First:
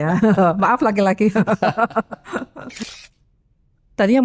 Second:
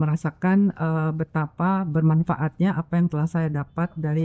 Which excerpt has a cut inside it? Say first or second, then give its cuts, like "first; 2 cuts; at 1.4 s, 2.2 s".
first; 1 cut; at 2.8 s